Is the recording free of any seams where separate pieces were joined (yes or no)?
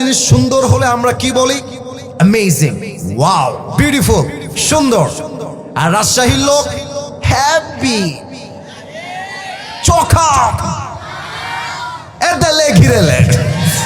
yes